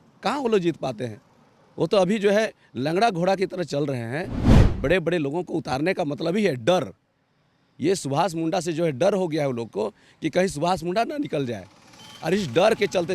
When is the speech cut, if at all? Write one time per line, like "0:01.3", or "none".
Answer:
0:04.5